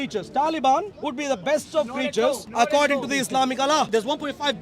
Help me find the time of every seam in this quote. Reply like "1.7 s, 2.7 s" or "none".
1.0 s, 2.4 s, 3.9 s